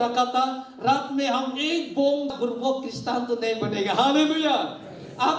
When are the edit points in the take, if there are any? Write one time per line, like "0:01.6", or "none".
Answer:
0:02.3